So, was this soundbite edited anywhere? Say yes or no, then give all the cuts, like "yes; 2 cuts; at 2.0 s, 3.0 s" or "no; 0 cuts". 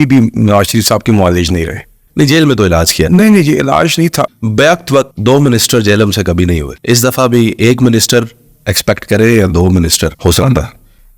yes; 4 cuts; at 4.3 s, 5.1 s, 6.7 s, 10.2 s